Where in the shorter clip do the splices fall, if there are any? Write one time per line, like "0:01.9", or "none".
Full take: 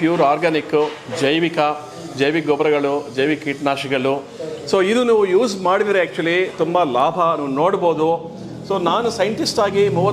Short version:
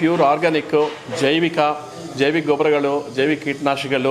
none